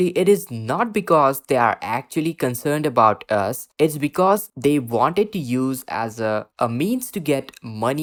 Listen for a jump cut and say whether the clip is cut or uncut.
uncut